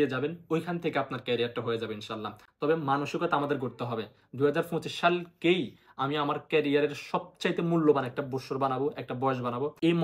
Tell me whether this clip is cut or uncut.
uncut